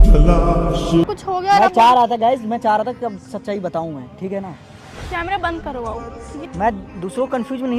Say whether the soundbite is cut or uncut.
cut